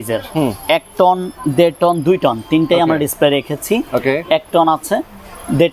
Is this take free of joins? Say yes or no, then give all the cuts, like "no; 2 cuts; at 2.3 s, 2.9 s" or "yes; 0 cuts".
yes; 0 cuts